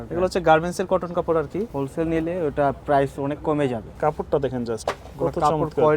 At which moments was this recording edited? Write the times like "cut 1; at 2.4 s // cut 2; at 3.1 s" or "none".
cut 1; at 1.7 s // cut 2; at 3.9 s